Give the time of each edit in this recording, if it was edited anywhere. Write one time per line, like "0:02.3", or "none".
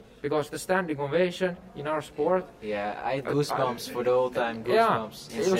none

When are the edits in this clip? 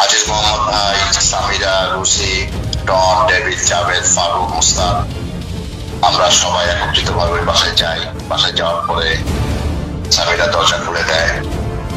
none

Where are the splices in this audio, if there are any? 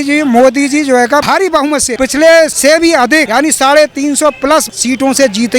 0:01.7
0:02.9
0:04.7

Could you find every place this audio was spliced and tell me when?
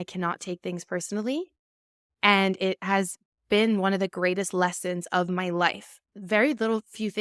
0:06.1

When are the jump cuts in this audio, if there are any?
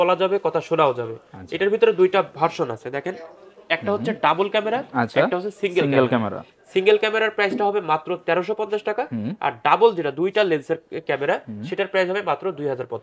none

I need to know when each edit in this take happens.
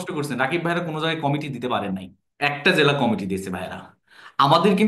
none

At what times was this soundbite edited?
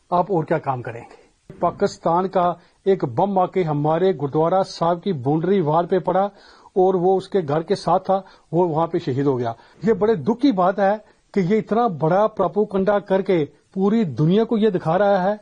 0:01.6
0:09.6

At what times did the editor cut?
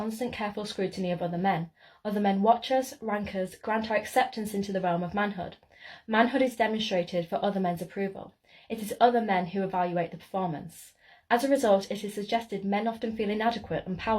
0:02.1

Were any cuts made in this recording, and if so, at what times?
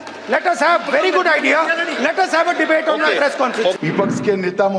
0:03.8

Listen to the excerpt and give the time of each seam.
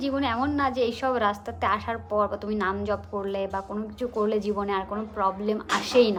none

